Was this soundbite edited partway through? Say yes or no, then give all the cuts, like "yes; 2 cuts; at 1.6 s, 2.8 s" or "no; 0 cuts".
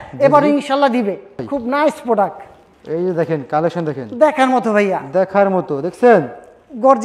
yes; 1 cut; at 1.5 s